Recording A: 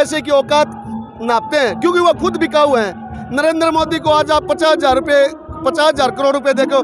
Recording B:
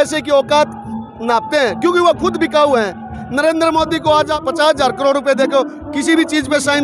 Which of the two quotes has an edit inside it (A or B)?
B